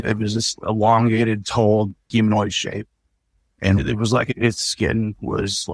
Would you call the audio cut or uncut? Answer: cut